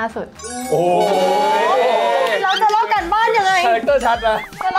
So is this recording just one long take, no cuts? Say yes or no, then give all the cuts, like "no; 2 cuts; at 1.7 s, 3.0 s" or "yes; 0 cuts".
yes; 0 cuts